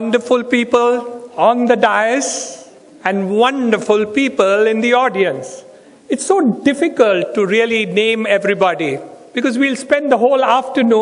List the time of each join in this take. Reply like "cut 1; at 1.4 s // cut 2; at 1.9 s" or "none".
none